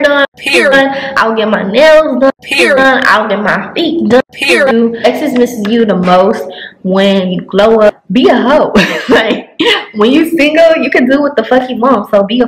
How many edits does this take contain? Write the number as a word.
two